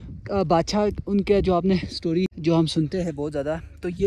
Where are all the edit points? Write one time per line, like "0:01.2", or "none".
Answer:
0:02.4